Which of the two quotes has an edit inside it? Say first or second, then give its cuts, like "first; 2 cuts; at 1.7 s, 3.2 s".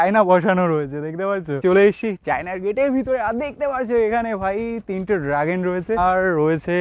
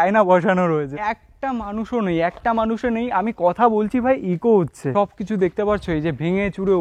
second; 2 cuts; at 0.9 s, 4.8 s